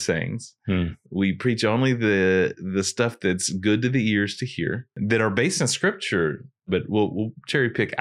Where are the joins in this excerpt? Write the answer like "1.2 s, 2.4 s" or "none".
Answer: 4.9 s, 6.7 s